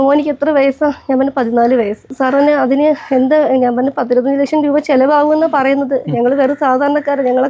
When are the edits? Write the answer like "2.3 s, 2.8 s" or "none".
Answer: none